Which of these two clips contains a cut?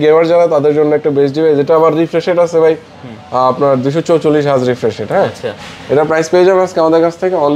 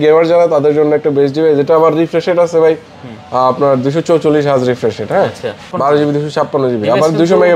second; 1 cut; at 5.7 s

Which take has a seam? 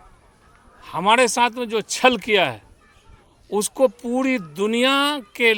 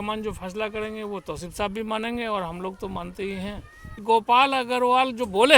second; 1 cut; at 4.0 s

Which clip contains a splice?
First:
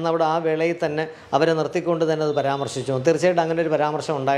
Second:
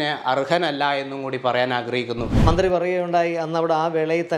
second; 1 cut; at 2.3 s

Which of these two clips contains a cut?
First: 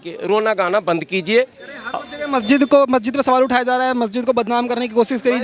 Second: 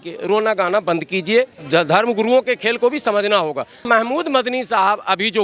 second; 2 cuts; at 1.6 s, 3.8 s

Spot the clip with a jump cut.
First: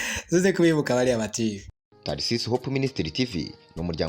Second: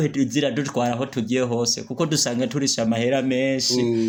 first; 1 cut; at 1.7 s

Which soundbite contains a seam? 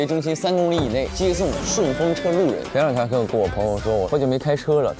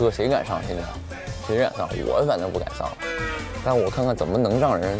first; 3 cuts; at 1.1 s, 2.6 s, 4.1 s

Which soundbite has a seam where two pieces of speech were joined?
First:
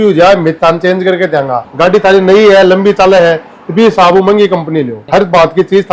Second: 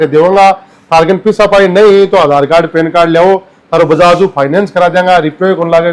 first; 2 cuts; at 1.7 s, 5.0 s

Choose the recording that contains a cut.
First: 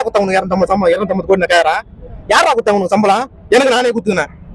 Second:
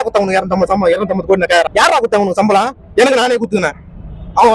second; 1 cut; at 1.7 s

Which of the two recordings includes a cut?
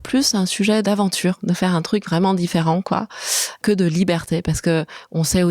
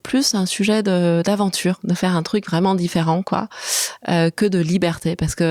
first; 2 cuts; at 0.8 s, 3.6 s

